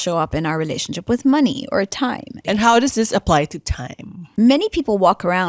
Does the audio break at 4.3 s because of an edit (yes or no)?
yes